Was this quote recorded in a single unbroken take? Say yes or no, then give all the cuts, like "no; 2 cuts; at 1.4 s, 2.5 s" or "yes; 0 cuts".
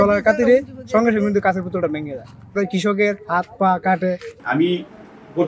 no; 1 cut; at 4.3 s